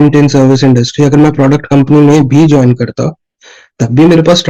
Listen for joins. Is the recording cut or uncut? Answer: uncut